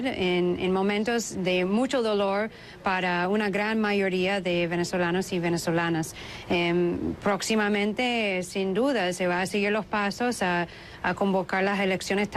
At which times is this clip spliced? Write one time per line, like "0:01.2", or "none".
0:03.4